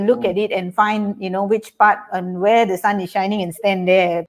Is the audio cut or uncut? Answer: uncut